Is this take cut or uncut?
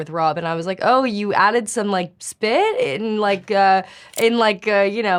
uncut